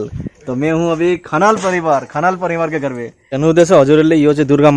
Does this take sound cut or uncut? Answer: cut